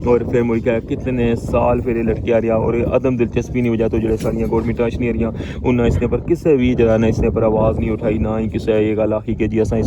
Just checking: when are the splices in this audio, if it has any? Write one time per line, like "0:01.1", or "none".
none